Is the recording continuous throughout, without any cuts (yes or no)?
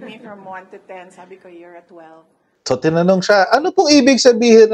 no